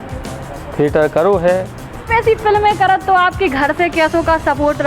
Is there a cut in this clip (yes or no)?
yes